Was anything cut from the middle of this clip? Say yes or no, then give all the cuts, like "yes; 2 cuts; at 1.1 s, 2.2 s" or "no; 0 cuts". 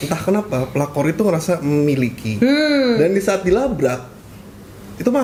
no; 0 cuts